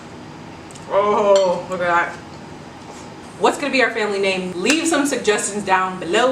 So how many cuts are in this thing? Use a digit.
1